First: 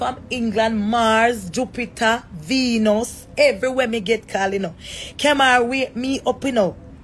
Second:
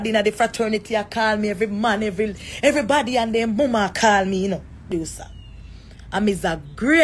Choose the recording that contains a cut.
second; 1 cut; at 4.9 s

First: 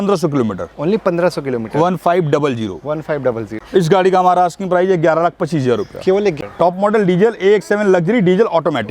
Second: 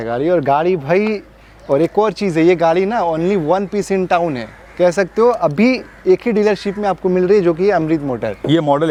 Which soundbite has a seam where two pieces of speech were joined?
first; 2 cuts; at 3.5 s, 6.4 s

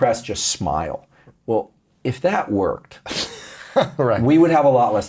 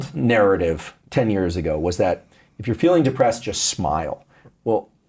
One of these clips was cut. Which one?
second; 1 cut; at 0.9 s

